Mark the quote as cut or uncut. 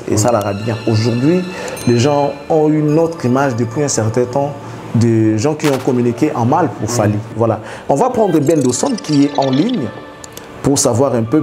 cut